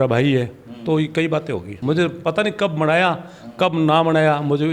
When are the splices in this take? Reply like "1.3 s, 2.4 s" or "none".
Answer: 1.7 s